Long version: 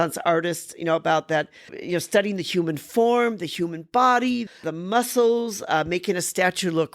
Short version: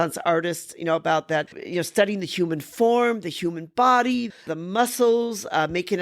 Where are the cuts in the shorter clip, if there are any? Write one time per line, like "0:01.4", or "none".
0:01.6